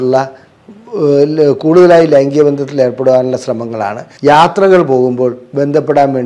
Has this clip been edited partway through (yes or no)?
yes